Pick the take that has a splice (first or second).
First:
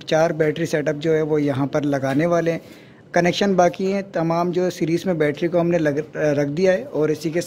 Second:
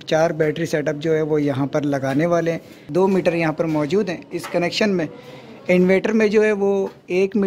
second